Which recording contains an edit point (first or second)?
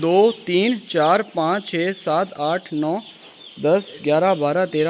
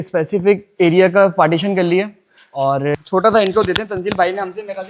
second